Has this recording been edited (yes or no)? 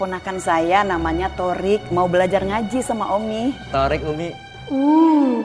yes